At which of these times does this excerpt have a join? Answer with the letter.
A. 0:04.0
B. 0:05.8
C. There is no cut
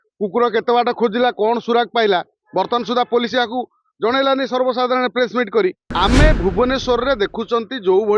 B